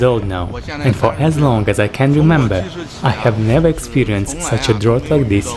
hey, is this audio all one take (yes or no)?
yes